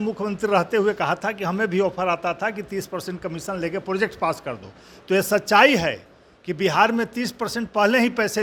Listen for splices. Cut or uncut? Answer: uncut